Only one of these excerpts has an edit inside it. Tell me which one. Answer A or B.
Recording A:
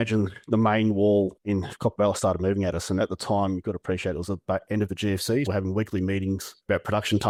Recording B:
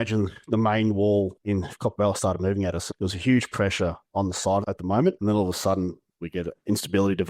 B